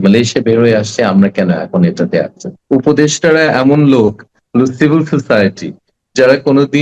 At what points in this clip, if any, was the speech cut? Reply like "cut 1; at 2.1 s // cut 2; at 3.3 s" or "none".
cut 1; at 2.5 s